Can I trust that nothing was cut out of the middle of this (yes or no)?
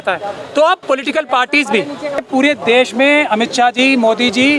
no